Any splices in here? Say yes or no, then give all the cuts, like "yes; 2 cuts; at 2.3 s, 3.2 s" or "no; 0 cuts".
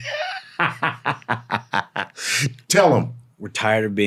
no; 0 cuts